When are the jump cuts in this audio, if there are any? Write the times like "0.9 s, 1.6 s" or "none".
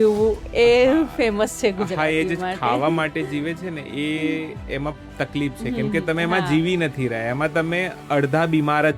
8.0 s